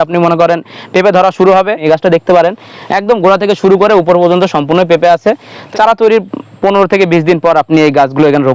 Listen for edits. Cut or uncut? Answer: cut